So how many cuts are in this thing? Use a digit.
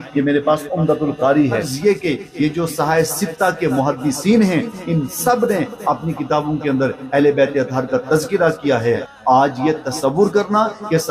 2